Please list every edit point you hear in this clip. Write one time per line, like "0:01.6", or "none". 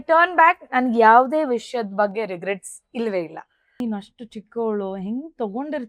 0:03.8